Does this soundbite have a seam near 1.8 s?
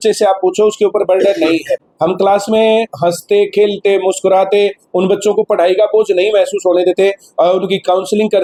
no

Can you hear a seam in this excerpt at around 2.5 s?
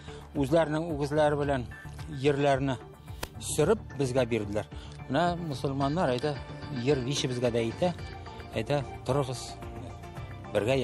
no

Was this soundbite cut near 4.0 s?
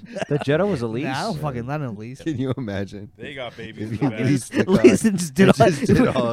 no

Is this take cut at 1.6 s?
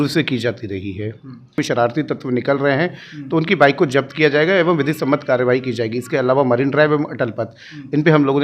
yes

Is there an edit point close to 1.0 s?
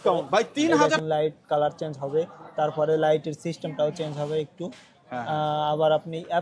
yes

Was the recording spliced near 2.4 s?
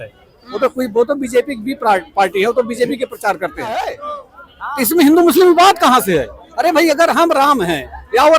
no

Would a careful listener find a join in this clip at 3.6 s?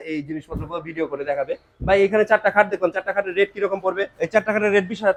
no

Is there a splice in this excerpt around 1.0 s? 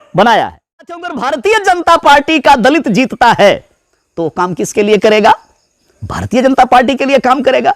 yes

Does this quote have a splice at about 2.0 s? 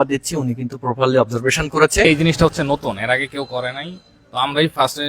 yes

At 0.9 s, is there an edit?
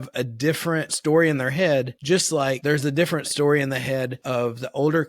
yes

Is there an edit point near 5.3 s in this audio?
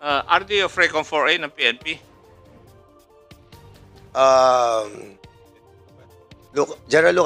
no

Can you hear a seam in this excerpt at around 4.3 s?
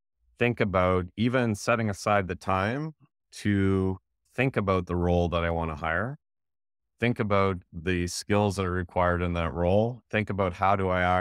yes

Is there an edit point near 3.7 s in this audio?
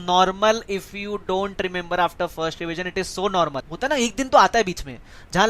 yes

